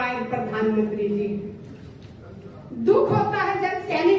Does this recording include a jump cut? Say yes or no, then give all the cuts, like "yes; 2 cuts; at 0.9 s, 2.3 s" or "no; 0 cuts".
no; 0 cuts